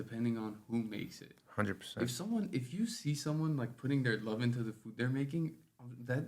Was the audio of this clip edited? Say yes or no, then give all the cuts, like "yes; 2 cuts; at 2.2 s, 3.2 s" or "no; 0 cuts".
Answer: no; 0 cuts